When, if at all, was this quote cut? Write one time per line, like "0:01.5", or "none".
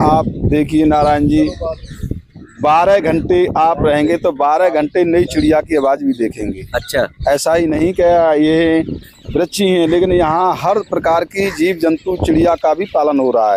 none